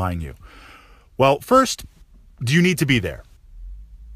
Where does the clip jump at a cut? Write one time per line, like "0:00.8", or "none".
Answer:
none